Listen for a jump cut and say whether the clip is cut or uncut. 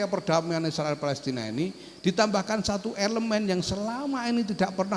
uncut